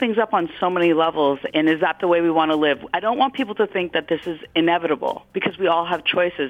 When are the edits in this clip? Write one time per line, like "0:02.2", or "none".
none